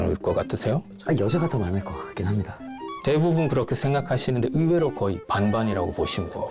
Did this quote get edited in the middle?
yes; 1 cut; at 0.9 s

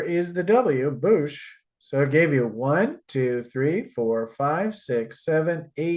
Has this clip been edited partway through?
no; 0 cuts

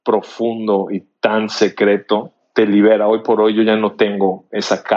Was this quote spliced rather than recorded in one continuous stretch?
yes; 1 cut; at 2.4 s

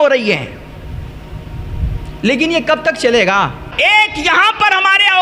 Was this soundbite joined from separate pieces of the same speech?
yes; 1 cut; at 3.7 s

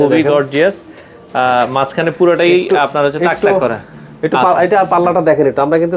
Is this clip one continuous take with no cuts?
yes; 0 cuts

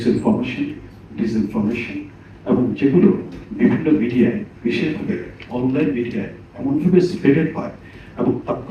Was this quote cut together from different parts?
no; 0 cuts

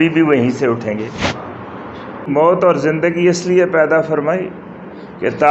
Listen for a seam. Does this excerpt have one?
yes; 1 cut; at 2.3 s

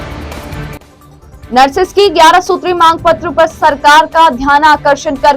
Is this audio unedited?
no; 1 cut; at 1.0 s

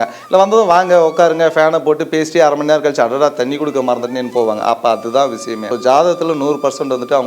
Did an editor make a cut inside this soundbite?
yes; 1 cut; at 5.7 s

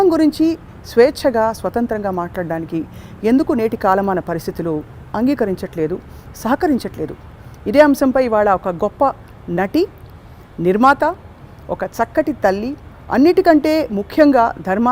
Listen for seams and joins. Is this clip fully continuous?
yes; 0 cuts

